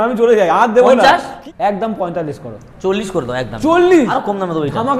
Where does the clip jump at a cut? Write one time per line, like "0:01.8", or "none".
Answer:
0:01.3
0:04.1